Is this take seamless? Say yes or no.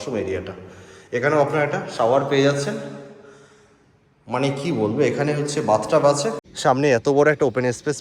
no